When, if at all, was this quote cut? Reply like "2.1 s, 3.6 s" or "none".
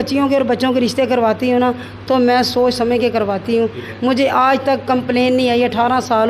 none